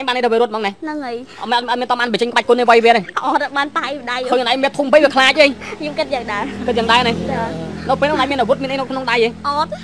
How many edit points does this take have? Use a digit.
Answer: 0